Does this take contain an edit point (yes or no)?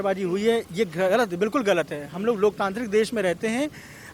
no